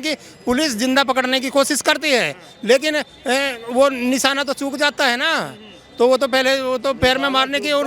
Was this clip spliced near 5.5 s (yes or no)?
no